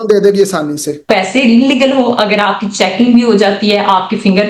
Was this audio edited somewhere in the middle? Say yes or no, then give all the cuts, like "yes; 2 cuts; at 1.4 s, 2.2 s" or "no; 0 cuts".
yes; 1 cut; at 1.0 s